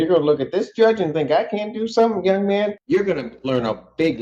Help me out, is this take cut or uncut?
cut